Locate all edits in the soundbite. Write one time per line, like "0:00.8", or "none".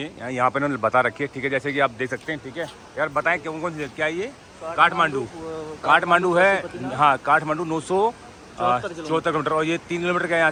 none